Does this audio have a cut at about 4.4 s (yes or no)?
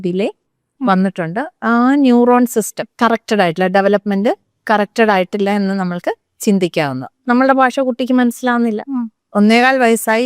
no